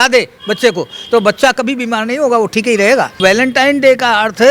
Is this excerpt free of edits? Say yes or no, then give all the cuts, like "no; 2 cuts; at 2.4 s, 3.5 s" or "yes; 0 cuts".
no; 1 cut; at 3.2 s